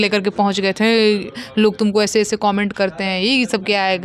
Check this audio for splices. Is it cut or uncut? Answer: uncut